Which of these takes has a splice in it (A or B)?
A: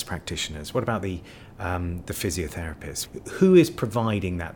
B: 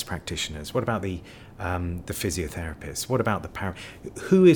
A